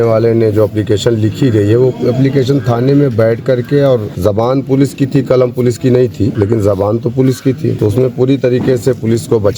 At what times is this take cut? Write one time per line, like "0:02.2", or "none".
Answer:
0:04.1
0:06.3
0:07.8